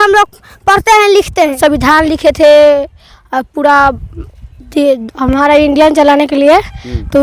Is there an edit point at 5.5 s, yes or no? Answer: no